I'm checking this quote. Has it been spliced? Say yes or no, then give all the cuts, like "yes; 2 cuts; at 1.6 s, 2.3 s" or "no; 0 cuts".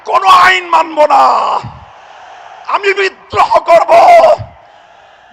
no; 0 cuts